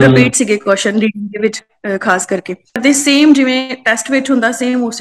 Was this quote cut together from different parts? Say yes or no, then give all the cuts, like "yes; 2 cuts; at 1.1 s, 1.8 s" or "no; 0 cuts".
yes; 1 cut; at 2.8 s